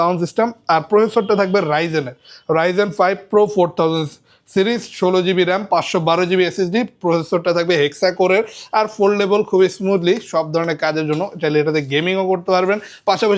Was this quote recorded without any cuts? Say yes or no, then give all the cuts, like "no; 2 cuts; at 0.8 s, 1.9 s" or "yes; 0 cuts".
yes; 0 cuts